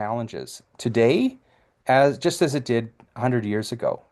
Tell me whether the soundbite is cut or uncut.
uncut